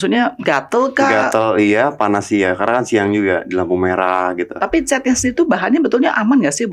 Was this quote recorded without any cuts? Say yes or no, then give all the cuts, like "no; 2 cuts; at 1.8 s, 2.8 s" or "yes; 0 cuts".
yes; 0 cuts